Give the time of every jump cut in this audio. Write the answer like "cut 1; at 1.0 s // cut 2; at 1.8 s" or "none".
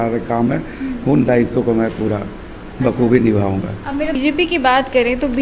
cut 1; at 4.2 s